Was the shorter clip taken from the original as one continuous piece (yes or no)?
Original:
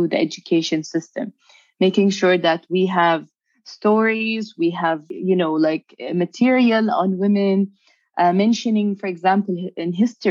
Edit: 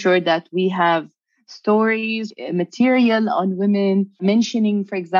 no